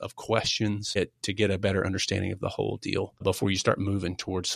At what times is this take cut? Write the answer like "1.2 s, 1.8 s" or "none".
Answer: 1.0 s, 3.2 s